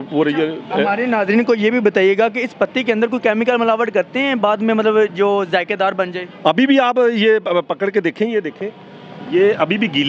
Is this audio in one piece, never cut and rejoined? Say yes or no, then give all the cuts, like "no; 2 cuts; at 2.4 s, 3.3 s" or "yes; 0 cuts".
yes; 0 cuts